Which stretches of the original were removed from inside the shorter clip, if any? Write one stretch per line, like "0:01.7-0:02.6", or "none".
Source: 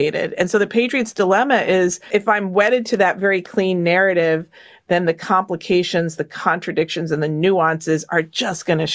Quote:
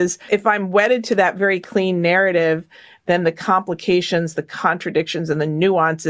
none